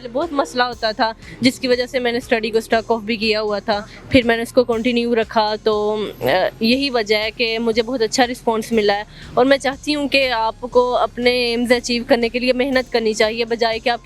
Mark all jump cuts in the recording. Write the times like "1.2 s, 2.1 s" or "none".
none